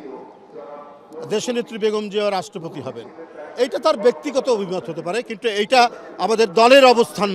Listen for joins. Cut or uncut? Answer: uncut